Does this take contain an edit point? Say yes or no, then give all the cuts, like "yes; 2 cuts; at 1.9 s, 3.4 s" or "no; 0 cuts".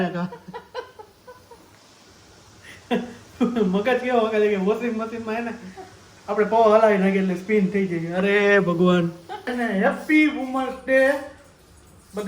yes; 1 cut; at 9.5 s